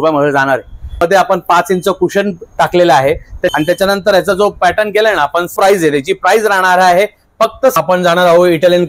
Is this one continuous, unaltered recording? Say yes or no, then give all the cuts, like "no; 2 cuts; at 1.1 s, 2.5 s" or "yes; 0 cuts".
no; 4 cuts; at 1.0 s, 3.5 s, 5.5 s, 7.8 s